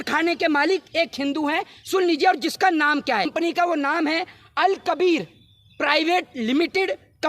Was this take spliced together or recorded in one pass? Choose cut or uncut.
cut